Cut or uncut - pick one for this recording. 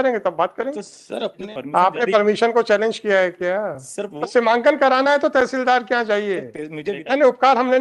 cut